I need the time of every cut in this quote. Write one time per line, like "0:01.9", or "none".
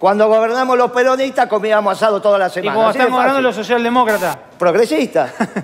none